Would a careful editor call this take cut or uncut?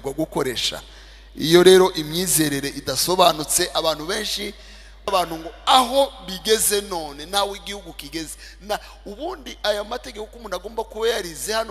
cut